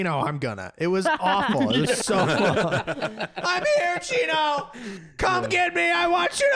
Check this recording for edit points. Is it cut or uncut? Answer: uncut